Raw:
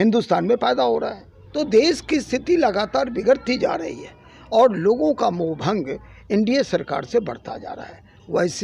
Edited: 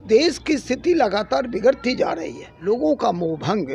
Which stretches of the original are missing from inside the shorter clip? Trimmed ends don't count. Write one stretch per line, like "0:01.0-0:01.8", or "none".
0:04.2-0:04.8